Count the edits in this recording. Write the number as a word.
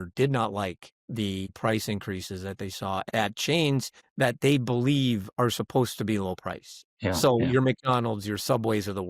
four